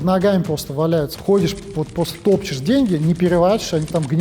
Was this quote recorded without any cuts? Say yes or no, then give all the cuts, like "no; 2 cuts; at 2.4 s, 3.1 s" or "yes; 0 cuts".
no; 1 cut; at 1.1 s